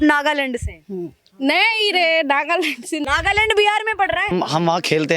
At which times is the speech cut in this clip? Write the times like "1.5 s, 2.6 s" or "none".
3.0 s, 4.3 s